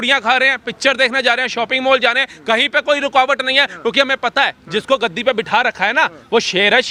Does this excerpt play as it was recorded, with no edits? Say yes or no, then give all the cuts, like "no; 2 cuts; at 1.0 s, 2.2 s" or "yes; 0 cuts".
yes; 0 cuts